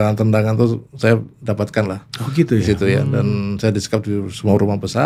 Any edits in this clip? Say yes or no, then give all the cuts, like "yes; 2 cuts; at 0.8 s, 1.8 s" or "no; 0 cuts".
no; 0 cuts